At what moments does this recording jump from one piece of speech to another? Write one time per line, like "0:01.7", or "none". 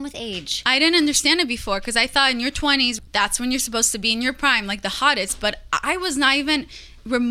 0:03.0